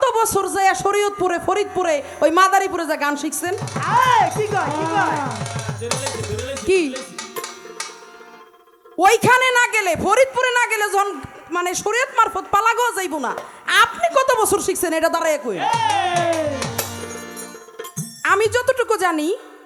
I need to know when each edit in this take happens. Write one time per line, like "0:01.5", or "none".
none